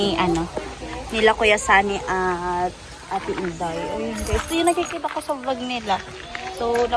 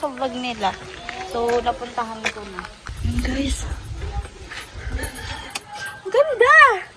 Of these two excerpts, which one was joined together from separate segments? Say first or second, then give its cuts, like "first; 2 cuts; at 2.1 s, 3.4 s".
second; 1 cut; at 2.9 s